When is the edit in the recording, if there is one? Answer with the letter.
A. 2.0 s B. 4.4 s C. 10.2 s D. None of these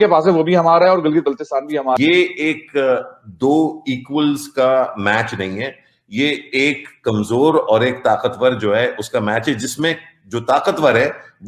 A